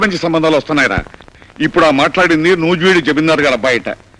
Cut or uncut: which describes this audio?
uncut